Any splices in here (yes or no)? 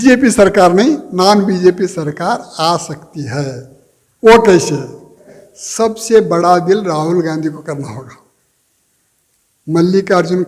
yes